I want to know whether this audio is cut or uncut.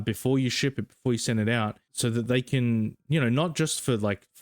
cut